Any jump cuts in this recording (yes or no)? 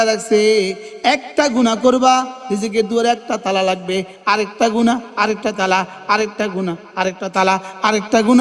no